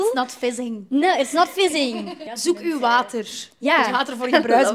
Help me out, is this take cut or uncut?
cut